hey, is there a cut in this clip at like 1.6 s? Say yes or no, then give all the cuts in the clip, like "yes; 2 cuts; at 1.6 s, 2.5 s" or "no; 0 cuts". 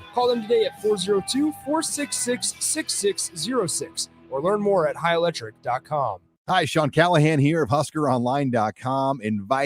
no; 1 cut; at 6.3 s